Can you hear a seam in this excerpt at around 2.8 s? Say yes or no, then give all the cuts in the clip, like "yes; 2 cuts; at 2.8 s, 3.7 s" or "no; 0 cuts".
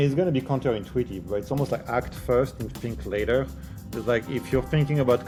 no; 0 cuts